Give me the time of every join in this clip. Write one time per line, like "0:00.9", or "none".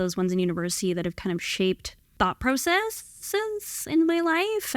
0:02.0